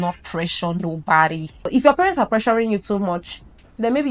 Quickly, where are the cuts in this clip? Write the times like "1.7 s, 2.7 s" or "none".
1.7 s